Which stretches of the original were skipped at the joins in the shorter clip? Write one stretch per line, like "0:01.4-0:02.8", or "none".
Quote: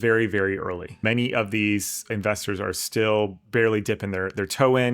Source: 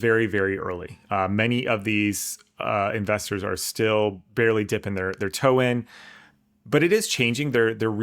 0:01.0-0:01.3
0:02.4-0:02.9